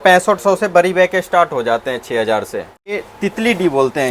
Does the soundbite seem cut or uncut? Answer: cut